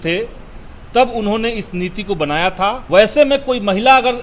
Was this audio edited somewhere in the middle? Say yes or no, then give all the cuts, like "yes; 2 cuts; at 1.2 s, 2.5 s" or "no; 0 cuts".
yes; 1 cut; at 2.8 s